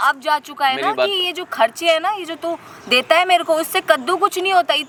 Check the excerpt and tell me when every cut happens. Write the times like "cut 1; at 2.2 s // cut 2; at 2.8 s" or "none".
none